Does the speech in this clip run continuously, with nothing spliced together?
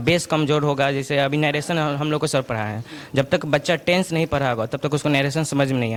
yes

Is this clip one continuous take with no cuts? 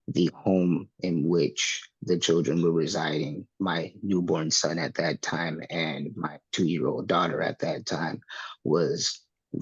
yes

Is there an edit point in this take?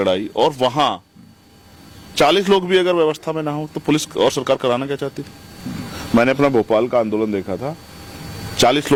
no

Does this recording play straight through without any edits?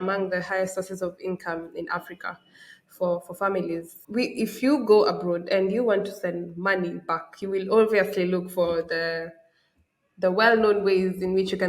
no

